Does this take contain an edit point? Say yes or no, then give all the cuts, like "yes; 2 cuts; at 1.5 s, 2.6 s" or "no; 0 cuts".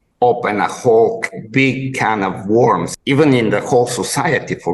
yes; 1 cut; at 2.9 s